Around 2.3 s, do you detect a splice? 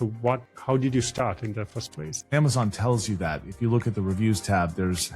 yes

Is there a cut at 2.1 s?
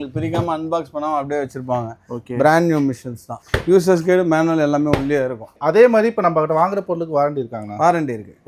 no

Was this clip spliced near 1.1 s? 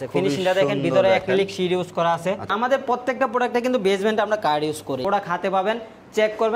no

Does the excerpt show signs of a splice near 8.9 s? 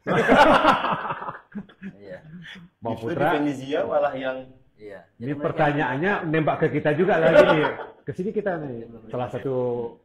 yes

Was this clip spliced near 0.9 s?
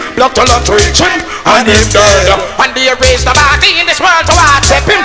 no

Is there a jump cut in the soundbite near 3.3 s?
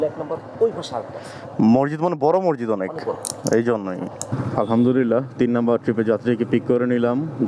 no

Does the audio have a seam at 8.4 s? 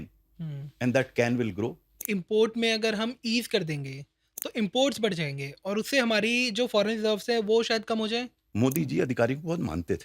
yes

